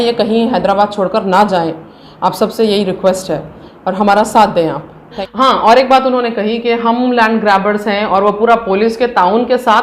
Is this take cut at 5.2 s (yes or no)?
yes